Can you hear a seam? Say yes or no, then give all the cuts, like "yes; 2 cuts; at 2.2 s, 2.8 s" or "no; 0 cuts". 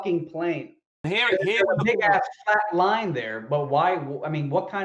yes; 1 cut; at 1.1 s